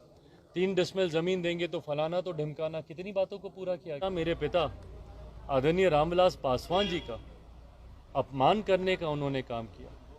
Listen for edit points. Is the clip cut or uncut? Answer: cut